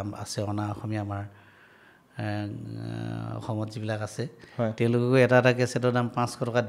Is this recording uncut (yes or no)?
yes